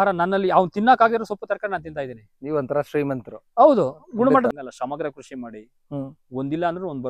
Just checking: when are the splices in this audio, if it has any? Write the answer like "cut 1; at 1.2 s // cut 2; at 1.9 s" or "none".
cut 1; at 4.5 s

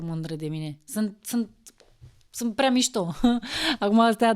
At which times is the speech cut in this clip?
none

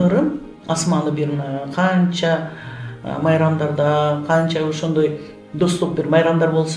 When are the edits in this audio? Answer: none

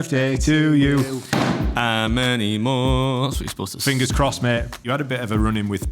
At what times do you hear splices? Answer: cut 1; at 4.8 s

